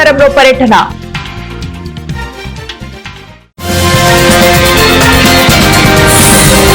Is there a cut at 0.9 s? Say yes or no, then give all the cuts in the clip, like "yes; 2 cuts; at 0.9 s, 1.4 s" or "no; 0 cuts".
yes; 1 cut; at 0.9 s